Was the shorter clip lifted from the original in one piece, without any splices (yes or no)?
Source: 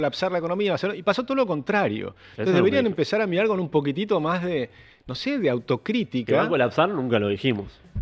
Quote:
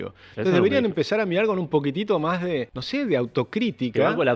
no